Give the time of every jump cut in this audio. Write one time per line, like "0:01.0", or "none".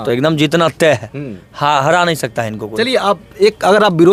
none